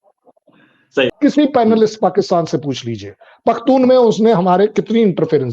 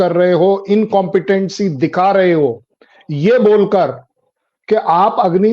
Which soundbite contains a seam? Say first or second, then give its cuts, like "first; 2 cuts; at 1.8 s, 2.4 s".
first; 1 cut; at 1.1 s